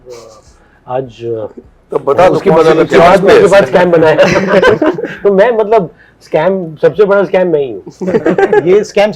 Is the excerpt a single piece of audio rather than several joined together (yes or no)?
yes